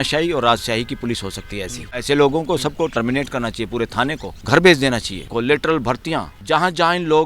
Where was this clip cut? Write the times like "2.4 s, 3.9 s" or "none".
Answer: 1.9 s, 4.3 s, 5.3 s, 6.3 s